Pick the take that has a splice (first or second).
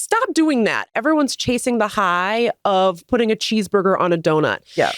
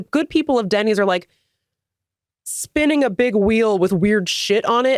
first